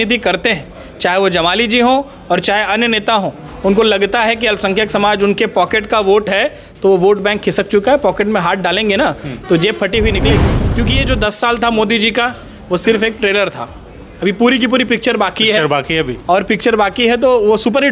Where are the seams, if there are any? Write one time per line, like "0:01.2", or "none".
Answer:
0:10.6